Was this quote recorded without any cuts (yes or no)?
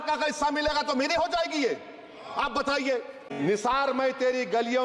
no